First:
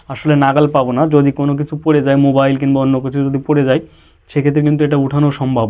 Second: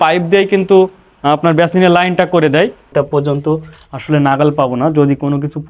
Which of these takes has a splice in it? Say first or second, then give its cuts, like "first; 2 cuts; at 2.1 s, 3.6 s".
second; 1 cut; at 2.9 s